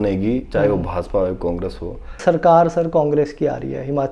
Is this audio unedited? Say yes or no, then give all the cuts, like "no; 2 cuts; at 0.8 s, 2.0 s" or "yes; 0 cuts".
no; 1 cut; at 2.2 s